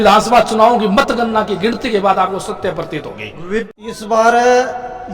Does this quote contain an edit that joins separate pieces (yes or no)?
yes